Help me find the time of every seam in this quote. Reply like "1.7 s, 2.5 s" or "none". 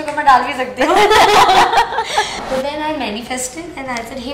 2.3 s

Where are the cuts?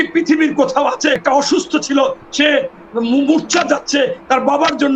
1.2 s

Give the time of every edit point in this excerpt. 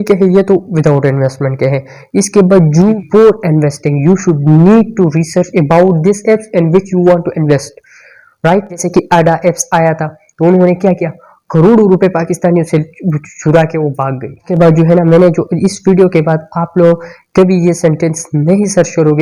2.8 s, 8.9 s, 14.5 s

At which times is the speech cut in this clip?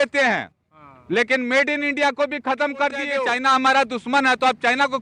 3.1 s

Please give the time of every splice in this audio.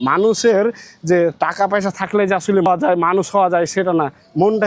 2.7 s

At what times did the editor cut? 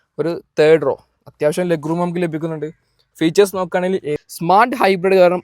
4.2 s

